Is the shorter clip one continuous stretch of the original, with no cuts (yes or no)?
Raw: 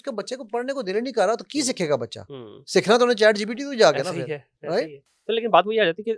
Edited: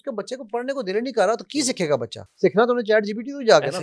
no